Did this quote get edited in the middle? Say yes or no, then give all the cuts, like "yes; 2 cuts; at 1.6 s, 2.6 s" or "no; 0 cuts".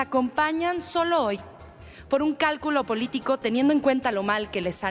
no; 0 cuts